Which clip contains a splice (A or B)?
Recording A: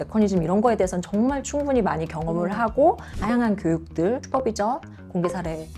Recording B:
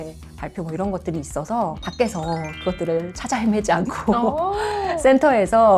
A